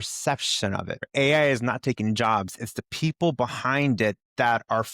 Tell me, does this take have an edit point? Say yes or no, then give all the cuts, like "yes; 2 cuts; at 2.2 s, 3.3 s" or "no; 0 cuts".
yes; 1 cut; at 1.1 s